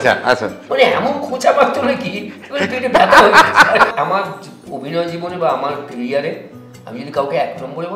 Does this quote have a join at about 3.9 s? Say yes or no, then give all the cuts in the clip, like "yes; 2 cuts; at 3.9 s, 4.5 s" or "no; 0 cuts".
yes; 1 cut; at 3.9 s